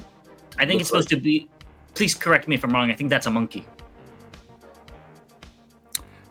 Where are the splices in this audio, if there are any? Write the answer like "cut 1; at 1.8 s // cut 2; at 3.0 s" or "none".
none